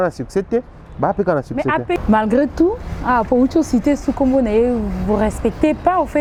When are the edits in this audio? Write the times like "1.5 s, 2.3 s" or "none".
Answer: none